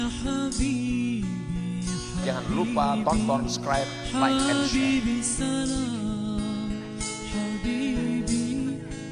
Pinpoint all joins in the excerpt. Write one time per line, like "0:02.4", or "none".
none